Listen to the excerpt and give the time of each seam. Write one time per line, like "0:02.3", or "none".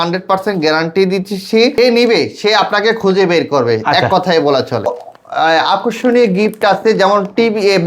0:01.8
0:05.0